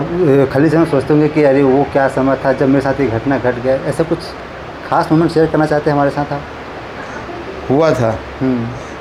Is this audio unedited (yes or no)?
yes